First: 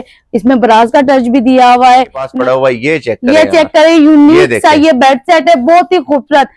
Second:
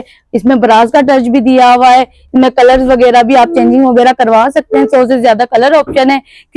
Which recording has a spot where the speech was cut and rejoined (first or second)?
first